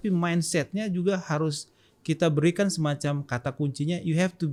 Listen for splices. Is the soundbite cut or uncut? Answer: uncut